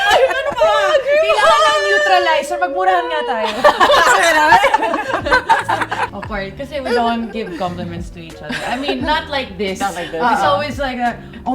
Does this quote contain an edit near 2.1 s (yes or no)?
no